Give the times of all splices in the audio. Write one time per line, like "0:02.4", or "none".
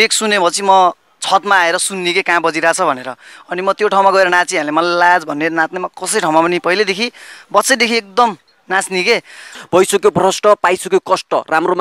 0:09.5